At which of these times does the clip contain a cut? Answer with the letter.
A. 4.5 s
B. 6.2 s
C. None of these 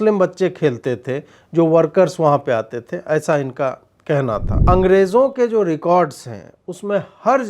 A